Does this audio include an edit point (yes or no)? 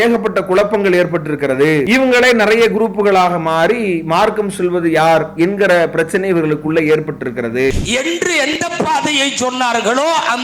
yes